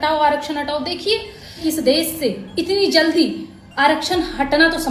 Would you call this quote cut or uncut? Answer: cut